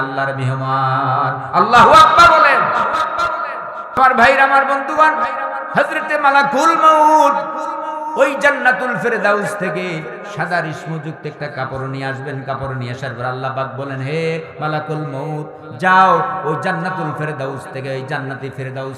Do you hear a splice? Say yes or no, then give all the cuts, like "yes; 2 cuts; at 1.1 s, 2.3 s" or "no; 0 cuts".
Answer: yes; 1 cut; at 4.0 s